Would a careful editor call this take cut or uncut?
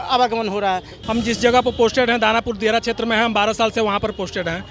cut